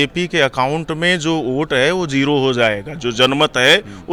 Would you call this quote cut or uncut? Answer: uncut